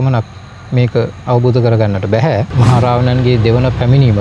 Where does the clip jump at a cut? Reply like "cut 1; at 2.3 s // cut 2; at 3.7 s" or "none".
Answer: cut 1; at 2.5 s